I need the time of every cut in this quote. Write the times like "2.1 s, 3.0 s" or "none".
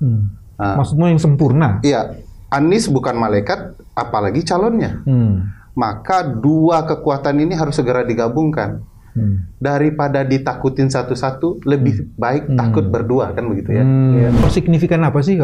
14.4 s